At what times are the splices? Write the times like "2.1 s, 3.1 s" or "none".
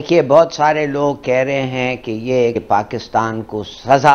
2.5 s